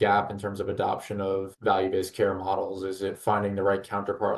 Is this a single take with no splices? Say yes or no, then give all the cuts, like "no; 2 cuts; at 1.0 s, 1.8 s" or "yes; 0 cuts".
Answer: no; 1 cut; at 1.5 s